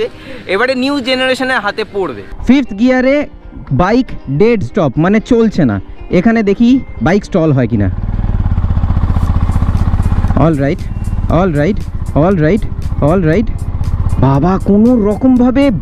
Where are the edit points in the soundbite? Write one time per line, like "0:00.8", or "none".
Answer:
0:02.3